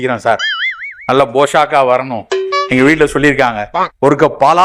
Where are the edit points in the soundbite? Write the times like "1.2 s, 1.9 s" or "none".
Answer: none